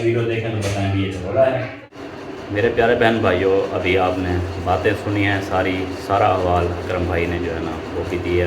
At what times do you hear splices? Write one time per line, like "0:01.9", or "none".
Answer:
0:02.3